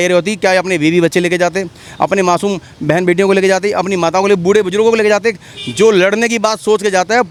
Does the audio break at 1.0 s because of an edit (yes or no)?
no